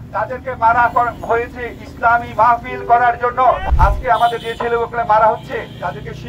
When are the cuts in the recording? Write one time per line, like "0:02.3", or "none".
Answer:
0:03.6